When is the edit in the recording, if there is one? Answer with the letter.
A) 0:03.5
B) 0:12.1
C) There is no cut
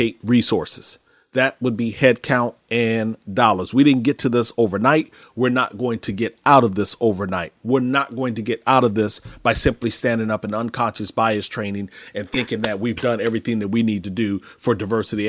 C